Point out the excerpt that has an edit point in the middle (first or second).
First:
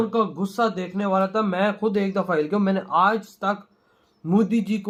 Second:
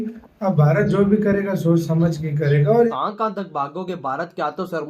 second